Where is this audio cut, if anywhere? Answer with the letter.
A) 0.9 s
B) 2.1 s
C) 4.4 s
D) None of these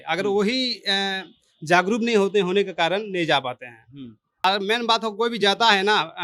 C